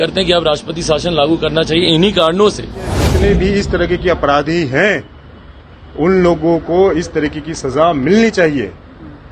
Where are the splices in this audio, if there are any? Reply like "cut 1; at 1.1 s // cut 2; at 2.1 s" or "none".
cut 1; at 3.0 s